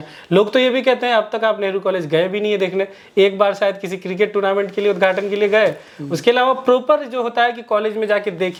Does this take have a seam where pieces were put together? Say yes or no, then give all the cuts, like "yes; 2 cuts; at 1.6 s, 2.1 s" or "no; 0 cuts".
no; 0 cuts